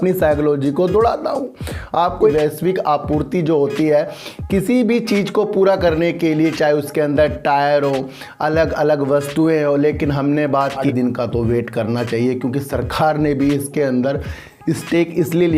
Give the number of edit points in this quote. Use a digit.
2